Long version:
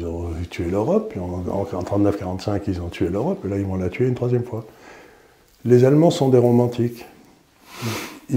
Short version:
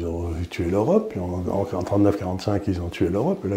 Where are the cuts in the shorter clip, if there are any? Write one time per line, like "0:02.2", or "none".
none